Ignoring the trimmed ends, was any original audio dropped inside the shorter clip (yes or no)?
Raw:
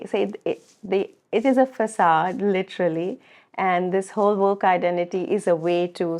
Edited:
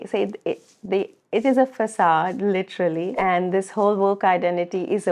yes